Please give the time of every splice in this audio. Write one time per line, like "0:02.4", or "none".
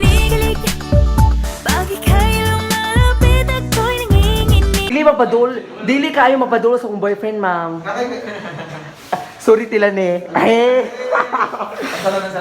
0:04.9